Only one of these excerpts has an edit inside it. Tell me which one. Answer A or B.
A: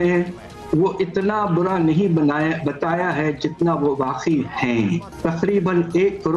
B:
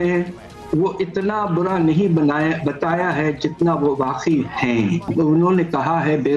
A